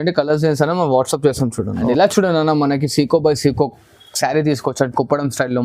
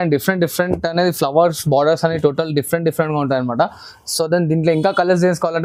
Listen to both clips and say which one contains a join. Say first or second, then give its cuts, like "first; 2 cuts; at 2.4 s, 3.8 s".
first; 1 cut; at 1.7 s